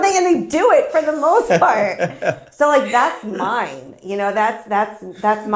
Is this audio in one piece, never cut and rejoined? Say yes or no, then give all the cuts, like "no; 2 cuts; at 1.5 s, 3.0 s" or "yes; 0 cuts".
yes; 0 cuts